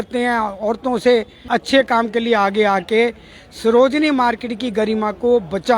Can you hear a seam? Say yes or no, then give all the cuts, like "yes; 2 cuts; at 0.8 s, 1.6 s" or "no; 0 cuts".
yes; 1 cut; at 1.4 s